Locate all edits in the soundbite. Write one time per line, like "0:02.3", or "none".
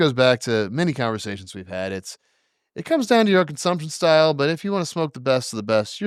none